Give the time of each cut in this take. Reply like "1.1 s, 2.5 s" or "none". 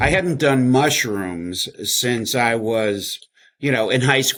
none